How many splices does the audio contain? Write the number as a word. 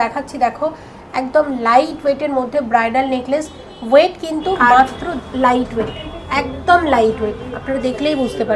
one